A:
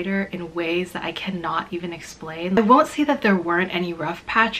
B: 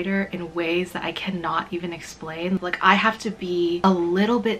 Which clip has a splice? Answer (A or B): B